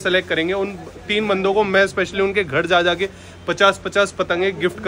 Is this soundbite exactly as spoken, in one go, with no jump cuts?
yes; 0 cuts

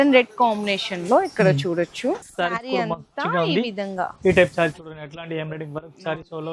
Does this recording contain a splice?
yes; 1 cut; at 2.3 s

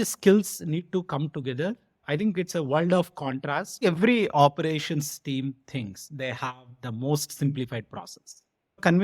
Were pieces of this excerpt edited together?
yes; 1 cut; at 3.8 s

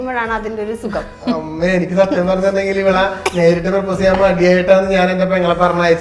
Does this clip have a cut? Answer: no; 0 cuts

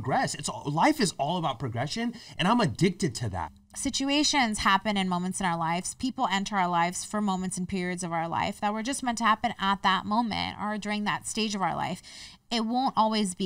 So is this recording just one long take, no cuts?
no; 1 cut; at 3.5 s

